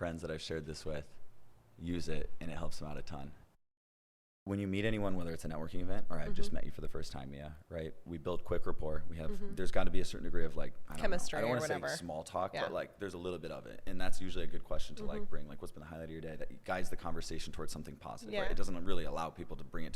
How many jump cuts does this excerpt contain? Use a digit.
1